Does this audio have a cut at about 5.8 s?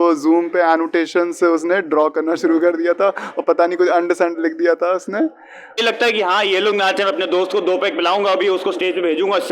yes; 1 cut; at 5.8 s

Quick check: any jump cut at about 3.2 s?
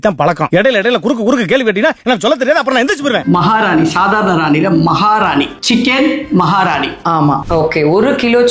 yes; 2 cuts; at 3.2 s, 7.4 s

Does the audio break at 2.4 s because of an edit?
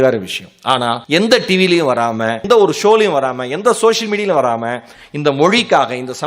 yes; 2 cuts; at 1.0 s, 2.4 s

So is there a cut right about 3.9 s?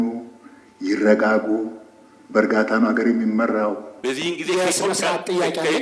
yes; 1 cut; at 3.9 s

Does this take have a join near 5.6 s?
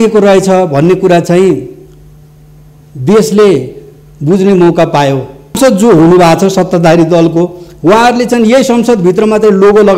yes; 1 cut; at 5.6 s

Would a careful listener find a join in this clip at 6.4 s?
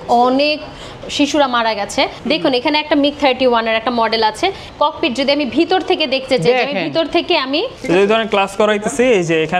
no; 3 cuts; at 2.2 s, 4.6 s, 7.7 s

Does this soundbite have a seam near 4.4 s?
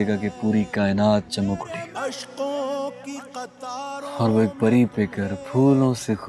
no; 1 cut; at 1.9 s

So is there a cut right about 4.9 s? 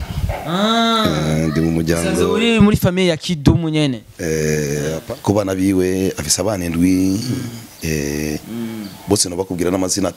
yes; 1 cut; at 4.9 s

